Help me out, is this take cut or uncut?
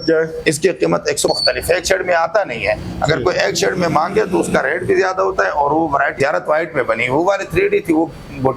cut